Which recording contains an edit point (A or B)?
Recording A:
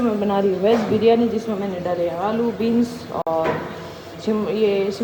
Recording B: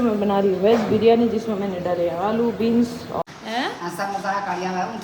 B